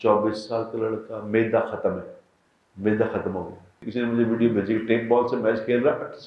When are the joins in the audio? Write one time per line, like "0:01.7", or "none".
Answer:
0:03.8